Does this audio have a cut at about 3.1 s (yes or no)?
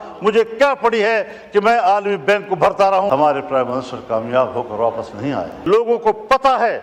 yes